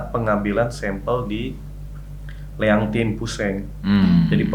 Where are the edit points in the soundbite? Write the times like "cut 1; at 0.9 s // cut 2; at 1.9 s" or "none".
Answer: none